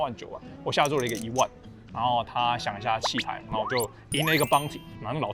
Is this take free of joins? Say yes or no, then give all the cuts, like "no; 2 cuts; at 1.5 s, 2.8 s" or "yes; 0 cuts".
no; 1 cut; at 3.4 s